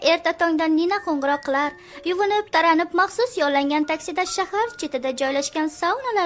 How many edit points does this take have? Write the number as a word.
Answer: zero